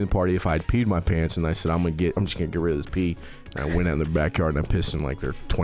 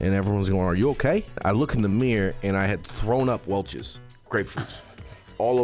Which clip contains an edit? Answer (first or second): second